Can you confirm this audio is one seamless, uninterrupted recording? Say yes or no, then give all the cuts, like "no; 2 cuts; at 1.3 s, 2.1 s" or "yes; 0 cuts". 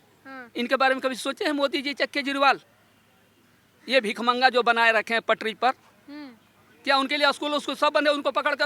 yes; 0 cuts